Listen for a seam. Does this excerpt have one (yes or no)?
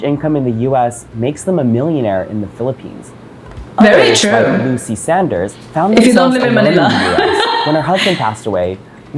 no